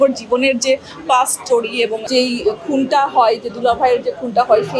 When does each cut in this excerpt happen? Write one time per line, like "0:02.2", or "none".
0:02.0